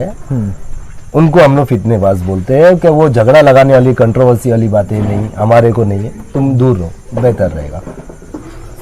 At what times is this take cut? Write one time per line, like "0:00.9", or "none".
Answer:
none